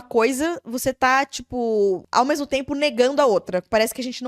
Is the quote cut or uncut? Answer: cut